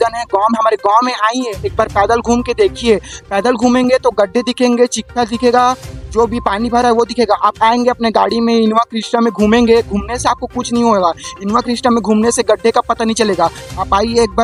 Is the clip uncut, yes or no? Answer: yes